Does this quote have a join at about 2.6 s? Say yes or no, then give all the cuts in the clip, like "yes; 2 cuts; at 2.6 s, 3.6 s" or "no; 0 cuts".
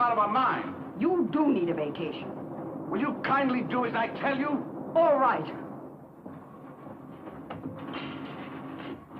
yes; 1 cut; at 2.6 s